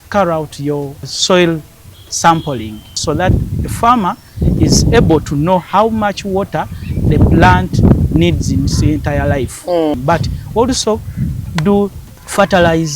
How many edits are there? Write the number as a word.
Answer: four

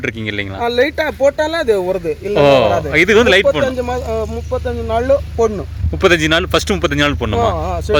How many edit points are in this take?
zero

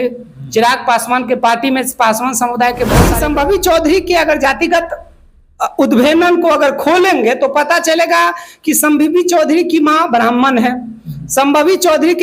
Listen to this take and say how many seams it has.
one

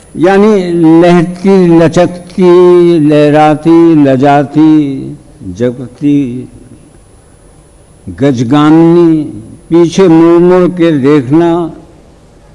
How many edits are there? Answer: zero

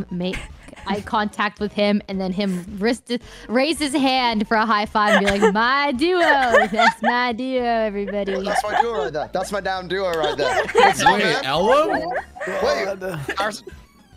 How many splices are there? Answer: zero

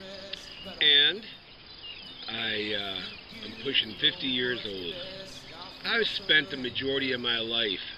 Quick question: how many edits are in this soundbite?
one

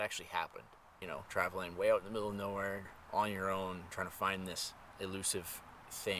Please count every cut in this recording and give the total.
three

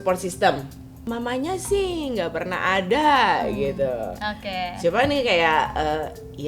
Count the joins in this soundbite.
one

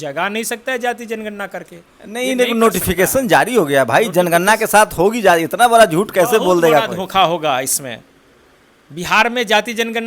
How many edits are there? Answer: zero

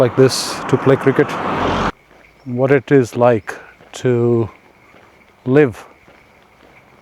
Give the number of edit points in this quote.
one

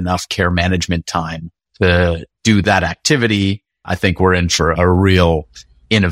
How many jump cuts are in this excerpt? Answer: one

